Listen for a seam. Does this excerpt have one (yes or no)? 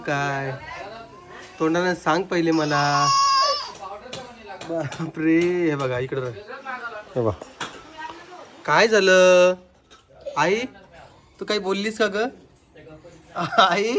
no